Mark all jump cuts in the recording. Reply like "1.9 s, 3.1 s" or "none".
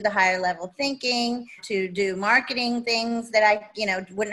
1.6 s